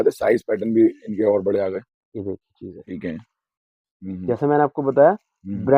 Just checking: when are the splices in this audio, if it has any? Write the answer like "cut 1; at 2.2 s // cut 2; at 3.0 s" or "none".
cut 1; at 2.9 s